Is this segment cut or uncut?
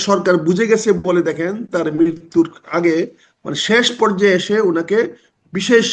uncut